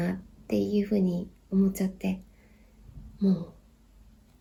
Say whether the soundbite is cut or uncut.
uncut